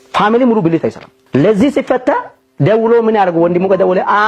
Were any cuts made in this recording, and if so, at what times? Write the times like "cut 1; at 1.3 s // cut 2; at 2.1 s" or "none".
cut 1; at 1.1 s